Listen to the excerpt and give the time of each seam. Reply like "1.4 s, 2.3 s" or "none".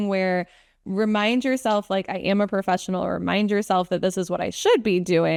none